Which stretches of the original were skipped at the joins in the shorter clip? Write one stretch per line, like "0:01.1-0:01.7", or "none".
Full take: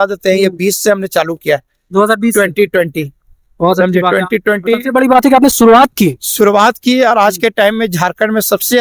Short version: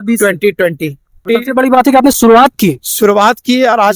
0:03.4-0:04.6

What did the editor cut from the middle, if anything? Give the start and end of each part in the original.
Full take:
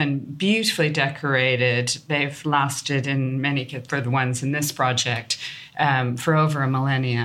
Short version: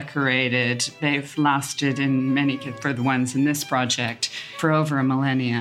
0:05.6-0:06.2

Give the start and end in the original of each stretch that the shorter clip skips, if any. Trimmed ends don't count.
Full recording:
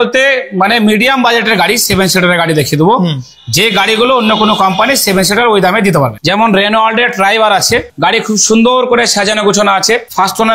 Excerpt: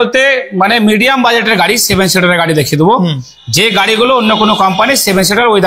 none

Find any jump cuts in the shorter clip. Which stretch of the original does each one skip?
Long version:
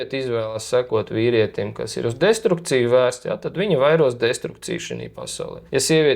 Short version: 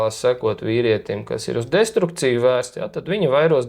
none

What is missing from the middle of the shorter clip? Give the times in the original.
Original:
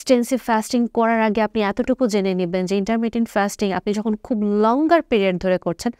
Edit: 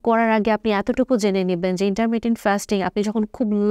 none

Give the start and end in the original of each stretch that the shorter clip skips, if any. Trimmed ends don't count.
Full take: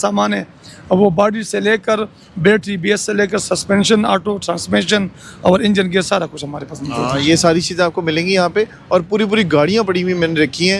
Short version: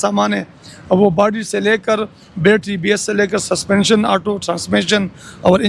none

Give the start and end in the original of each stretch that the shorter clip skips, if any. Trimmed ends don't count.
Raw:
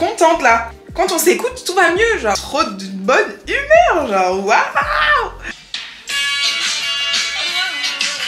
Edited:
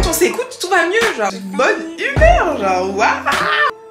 0:02.4-0:02.9

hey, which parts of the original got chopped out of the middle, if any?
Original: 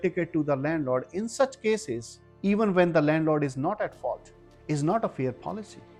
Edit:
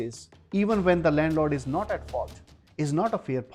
none

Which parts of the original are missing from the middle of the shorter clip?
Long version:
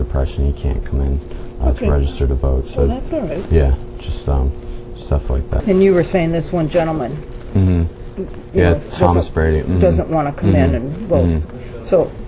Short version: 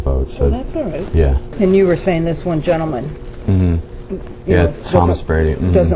0:03.8-0:05.5

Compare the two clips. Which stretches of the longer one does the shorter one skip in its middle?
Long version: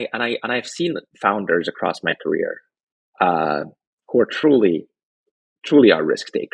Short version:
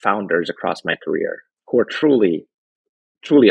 0:02.7-0:03.9

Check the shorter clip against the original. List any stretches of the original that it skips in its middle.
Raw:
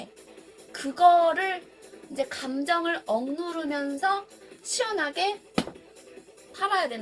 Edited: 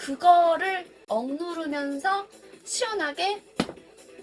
0:01.8-0:03.0

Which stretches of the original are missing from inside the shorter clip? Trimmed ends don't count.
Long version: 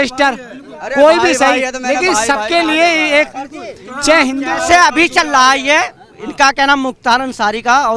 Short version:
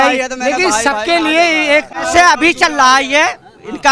0:03.4-0:04.5

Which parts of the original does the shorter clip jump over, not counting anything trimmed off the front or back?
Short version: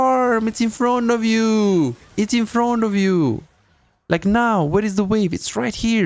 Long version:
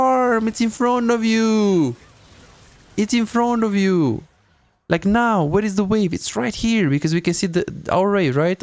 0:02.0-0:02.8

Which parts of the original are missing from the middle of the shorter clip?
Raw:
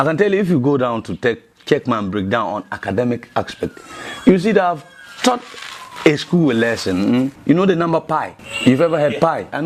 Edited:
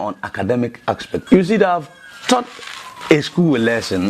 0:03.7-0:04.2

